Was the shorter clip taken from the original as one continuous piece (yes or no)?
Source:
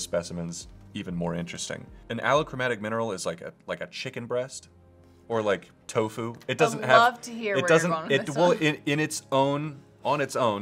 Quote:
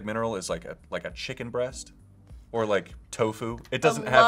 yes